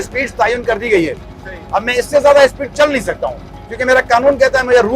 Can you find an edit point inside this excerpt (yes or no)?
no